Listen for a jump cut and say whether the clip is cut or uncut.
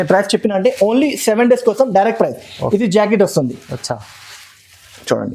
uncut